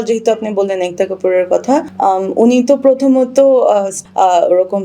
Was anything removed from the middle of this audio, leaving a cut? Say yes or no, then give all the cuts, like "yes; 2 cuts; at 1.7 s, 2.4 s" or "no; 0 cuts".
yes; 2 cuts; at 1.9 s, 3.9 s